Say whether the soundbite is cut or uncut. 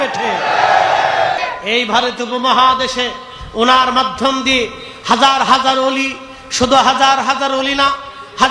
cut